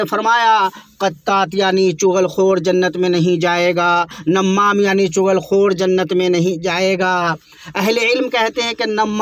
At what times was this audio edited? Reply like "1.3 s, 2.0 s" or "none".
4.2 s